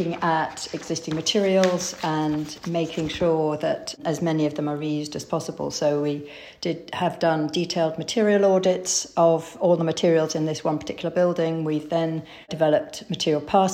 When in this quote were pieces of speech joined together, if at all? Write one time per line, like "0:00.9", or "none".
none

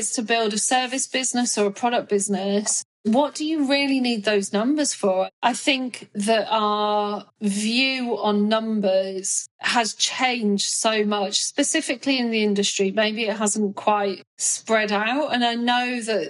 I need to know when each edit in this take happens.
0:05.2

